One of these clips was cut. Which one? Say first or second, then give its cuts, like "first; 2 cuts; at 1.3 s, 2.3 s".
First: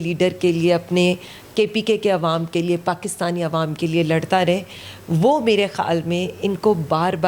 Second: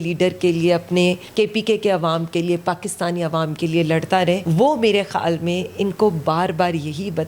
second; 2 cuts; at 1.2 s, 4.4 s